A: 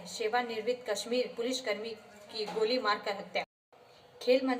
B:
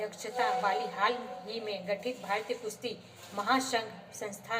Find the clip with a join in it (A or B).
A